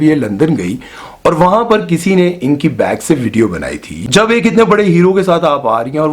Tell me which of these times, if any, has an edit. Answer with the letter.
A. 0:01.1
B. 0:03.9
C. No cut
B